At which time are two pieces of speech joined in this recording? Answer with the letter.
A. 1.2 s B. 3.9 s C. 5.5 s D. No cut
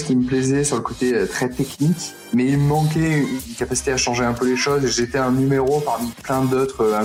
D